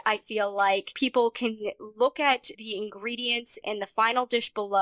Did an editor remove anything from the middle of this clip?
yes; 2 cuts; at 0.9 s, 2.5 s

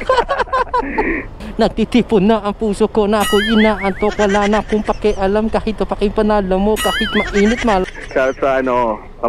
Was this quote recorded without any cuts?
no; 2 cuts; at 1.3 s, 7.8 s

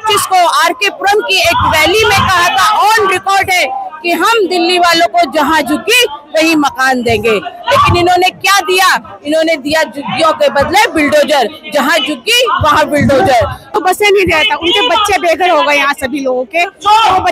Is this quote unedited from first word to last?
no; 1 cut; at 13.7 s

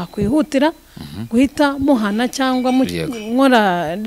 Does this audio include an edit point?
no; 0 cuts

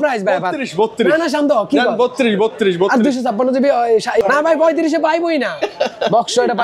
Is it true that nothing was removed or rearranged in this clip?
yes; 0 cuts

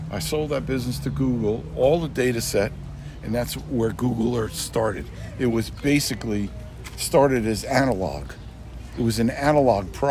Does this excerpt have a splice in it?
no; 0 cuts

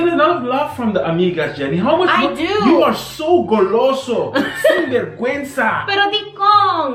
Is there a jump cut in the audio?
no; 0 cuts

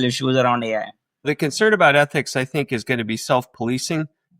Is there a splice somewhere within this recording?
yes; 1 cut; at 1.3 s

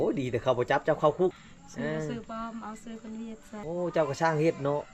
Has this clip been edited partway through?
yes; 2 cuts; at 1.3 s, 3.6 s

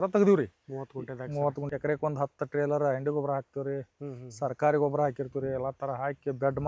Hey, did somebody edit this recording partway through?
yes; 1 cut; at 1.6 s

